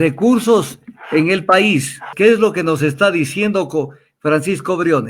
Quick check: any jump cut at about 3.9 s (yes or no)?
no